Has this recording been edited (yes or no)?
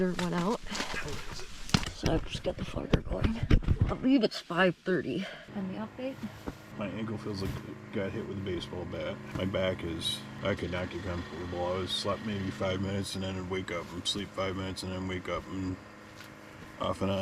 yes